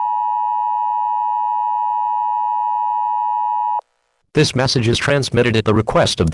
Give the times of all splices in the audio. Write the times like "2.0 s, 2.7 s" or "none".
3.8 s